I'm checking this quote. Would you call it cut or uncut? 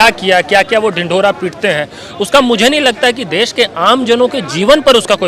uncut